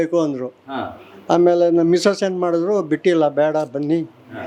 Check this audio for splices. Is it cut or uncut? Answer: uncut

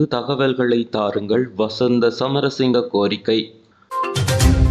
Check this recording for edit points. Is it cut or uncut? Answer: cut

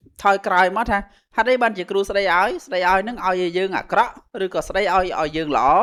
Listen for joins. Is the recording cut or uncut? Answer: uncut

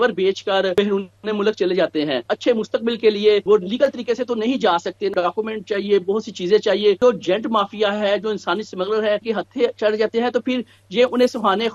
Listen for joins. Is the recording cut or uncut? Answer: cut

